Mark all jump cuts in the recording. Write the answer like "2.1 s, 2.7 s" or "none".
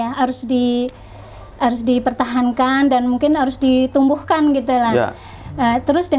none

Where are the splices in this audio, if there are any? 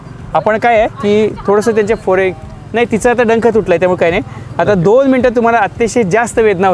none

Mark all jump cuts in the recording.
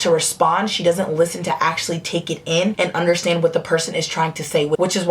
none

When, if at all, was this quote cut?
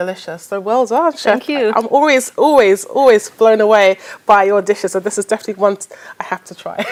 none

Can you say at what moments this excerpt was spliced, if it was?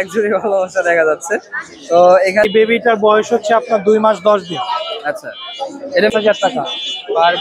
2.5 s, 6.1 s

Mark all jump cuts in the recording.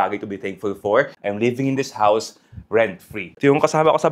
1.1 s, 3.3 s

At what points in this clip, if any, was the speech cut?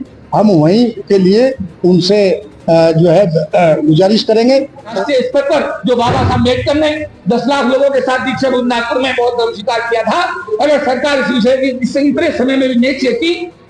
4.9 s

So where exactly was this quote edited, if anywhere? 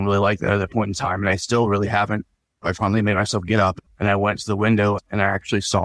2.7 s, 3.8 s

